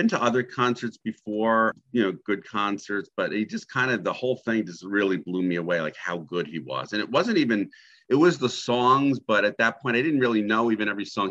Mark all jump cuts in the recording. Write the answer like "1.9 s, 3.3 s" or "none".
1.8 s

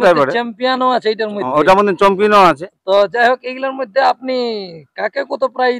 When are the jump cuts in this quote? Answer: none

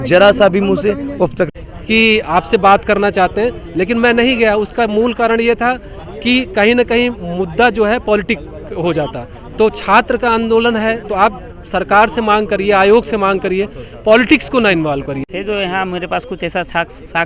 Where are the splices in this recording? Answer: 1.5 s, 15.3 s

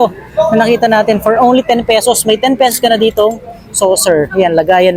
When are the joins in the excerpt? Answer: none

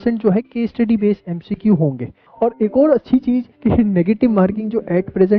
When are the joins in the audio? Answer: 2.2 s

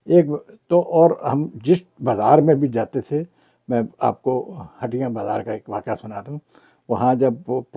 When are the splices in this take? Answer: none

